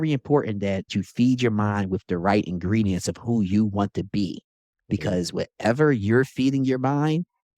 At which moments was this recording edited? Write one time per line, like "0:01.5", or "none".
0:00.9